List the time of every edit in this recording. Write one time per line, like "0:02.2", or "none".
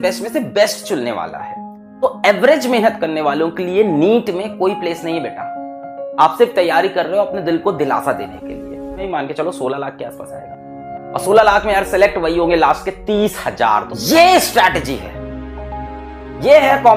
0:09.0
0:13.9